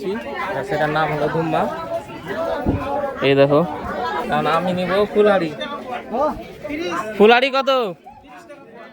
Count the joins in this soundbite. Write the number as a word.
zero